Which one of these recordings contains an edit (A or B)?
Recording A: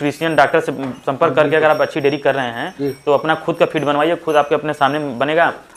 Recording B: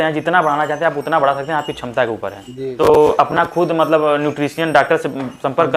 B